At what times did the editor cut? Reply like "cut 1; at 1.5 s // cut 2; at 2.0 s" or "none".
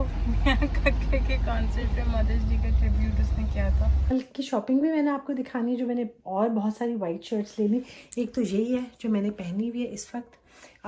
cut 1; at 4.1 s

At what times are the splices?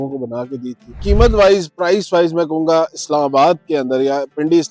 cut 1; at 1.0 s

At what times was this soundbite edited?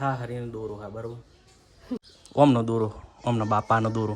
cut 1; at 2.0 s

